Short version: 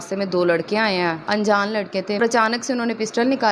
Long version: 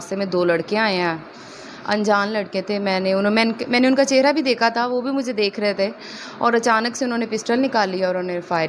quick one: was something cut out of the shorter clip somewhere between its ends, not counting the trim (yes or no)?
yes